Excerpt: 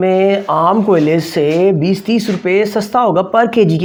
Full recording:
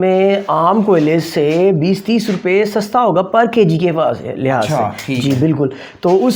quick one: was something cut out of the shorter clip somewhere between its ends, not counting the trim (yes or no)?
no